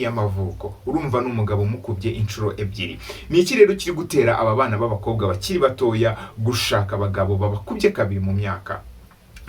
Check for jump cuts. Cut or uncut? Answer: uncut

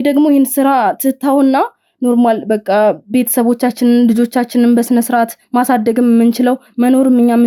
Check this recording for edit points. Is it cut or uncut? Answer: uncut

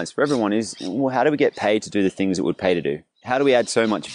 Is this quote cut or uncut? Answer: cut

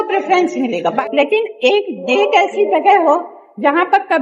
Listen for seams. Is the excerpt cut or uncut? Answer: cut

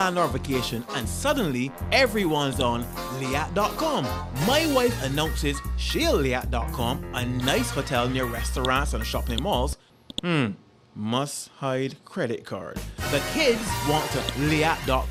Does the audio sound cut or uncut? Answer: uncut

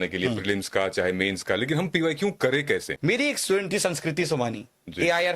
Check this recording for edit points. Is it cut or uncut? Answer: cut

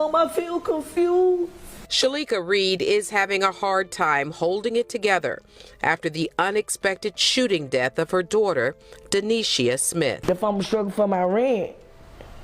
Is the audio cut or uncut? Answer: cut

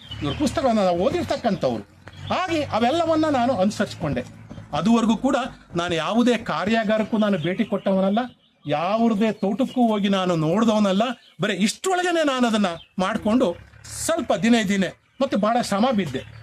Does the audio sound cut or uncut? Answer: uncut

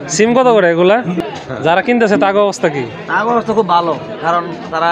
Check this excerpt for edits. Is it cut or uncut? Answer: cut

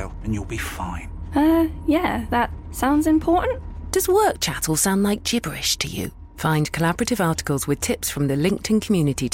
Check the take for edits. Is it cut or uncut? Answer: uncut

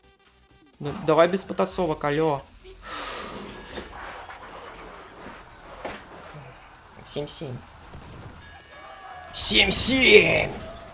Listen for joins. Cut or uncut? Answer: cut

